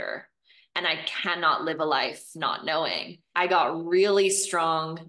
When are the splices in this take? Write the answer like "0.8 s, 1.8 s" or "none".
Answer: 3.2 s